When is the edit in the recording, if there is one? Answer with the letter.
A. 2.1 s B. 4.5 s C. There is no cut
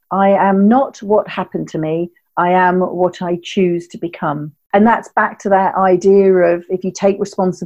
B